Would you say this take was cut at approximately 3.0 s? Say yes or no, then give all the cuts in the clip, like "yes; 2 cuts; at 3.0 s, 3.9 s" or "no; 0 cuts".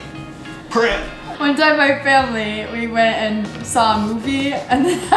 no; 1 cut; at 1.3 s